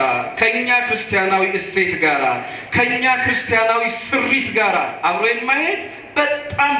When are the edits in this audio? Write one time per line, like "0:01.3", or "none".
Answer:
none